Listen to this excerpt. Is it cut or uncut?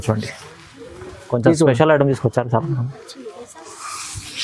uncut